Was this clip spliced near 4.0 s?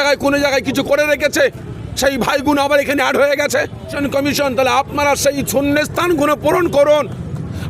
yes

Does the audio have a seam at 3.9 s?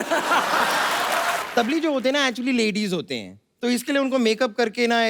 no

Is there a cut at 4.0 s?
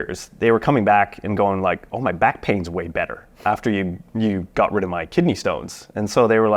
no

